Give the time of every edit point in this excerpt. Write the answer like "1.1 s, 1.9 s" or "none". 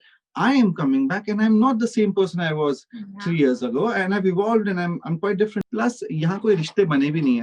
5.6 s

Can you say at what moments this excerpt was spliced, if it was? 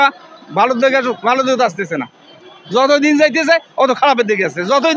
none

